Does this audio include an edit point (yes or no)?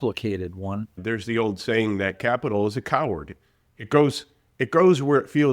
yes